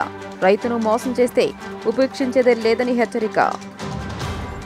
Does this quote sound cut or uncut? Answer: uncut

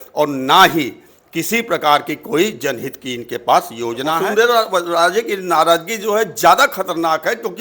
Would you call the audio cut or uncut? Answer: cut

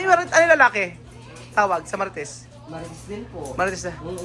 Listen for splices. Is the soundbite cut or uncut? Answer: uncut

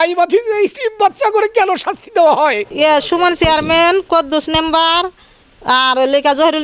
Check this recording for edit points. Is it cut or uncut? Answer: cut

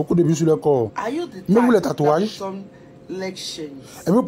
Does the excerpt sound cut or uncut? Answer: uncut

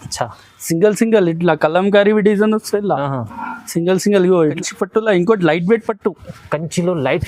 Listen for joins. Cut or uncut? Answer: cut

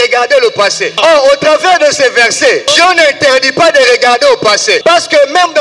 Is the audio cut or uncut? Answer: cut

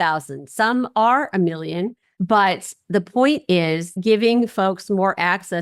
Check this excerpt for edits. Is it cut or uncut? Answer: cut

